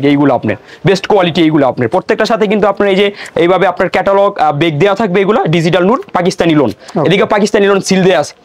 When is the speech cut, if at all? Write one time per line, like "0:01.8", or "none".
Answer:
none